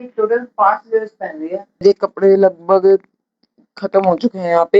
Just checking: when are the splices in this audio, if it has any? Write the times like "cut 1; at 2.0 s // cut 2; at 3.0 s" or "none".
cut 1; at 1.8 s

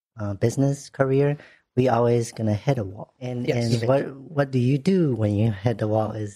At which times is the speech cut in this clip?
cut 1; at 3.5 s

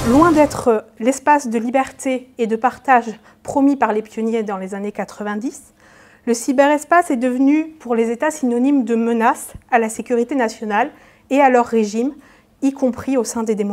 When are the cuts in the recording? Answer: none

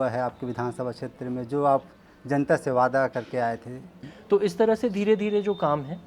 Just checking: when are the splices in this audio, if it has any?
cut 1; at 4.1 s

